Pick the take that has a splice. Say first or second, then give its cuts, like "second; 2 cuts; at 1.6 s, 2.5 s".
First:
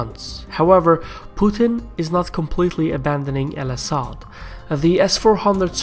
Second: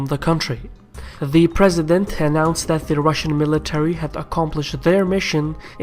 second; 1 cut; at 3.7 s